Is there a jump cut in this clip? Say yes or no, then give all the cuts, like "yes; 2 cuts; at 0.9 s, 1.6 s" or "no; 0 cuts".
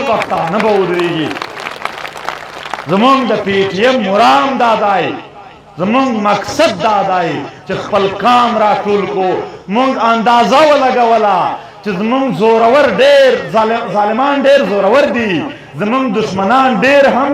no; 0 cuts